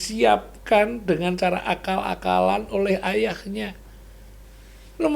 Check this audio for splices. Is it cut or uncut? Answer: uncut